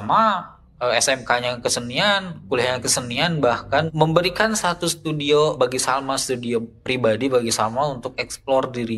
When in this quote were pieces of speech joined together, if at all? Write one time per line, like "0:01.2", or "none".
0:03.9
0:05.5